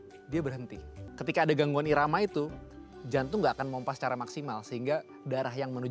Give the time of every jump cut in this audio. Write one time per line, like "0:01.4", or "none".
0:01.0